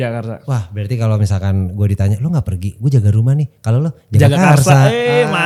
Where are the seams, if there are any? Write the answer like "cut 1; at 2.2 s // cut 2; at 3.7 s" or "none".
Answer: none

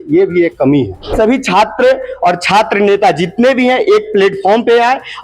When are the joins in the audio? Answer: cut 1; at 1.1 s

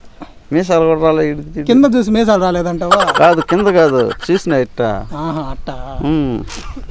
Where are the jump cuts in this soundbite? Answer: none

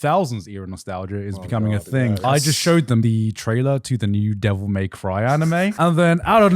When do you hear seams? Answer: cut 1; at 2.2 s // cut 2; at 3.0 s // cut 3; at 5.7 s

